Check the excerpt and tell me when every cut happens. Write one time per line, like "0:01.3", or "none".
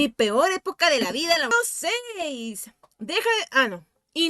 0:01.5